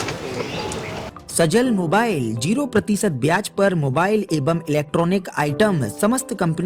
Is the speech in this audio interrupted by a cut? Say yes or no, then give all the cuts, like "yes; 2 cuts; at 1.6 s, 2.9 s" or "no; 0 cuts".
yes; 1 cut; at 1.2 s